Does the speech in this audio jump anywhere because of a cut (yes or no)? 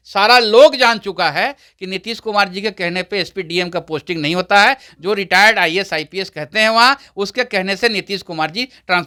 no